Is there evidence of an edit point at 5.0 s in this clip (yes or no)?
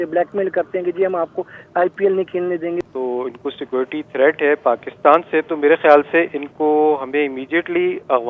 no